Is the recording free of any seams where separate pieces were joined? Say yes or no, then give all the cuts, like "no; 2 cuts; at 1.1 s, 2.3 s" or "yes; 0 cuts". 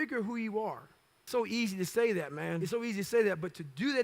no; 2 cuts; at 1.3 s, 2.6 s